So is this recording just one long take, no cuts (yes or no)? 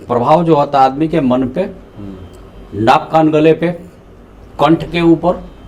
yes